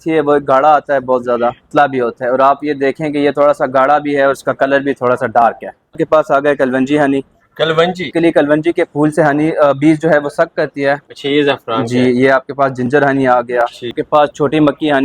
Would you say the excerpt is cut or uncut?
cut